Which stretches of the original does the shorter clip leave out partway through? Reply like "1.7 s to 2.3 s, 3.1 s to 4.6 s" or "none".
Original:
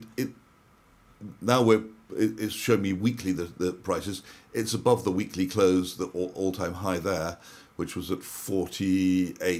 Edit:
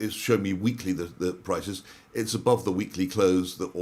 none